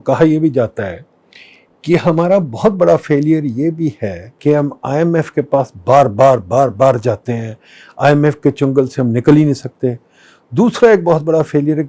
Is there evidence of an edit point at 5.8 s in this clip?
no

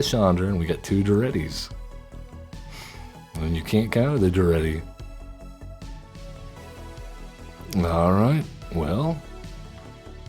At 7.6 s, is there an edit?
no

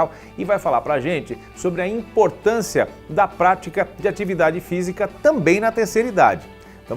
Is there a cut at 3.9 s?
no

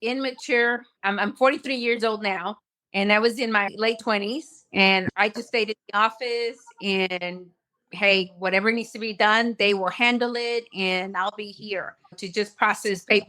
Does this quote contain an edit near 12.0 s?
yes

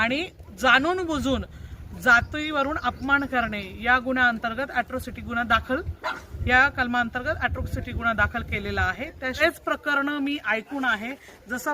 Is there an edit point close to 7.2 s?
no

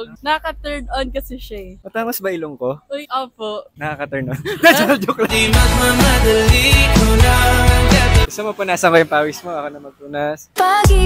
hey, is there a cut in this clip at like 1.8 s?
yes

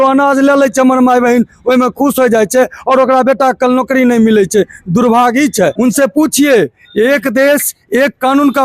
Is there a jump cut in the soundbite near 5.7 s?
yes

